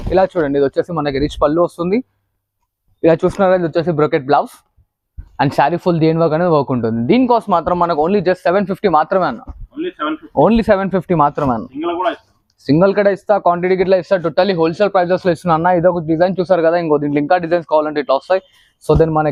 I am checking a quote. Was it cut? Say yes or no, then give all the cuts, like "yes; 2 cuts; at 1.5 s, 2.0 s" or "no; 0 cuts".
no; 0 cuts